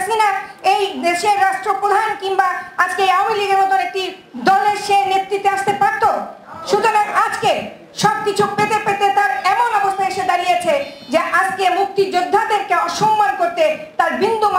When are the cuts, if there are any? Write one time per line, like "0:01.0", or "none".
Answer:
none